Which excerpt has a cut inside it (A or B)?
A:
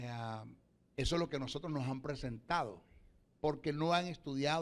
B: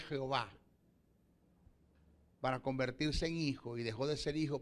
A